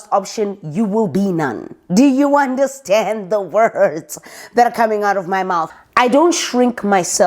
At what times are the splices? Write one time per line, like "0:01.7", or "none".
0:05.6